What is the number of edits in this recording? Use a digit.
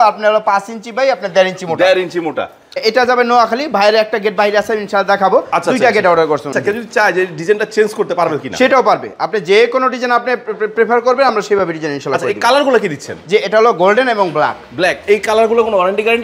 2